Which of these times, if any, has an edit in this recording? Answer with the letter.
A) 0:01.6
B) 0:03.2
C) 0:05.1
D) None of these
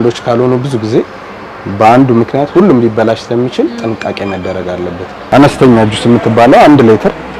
C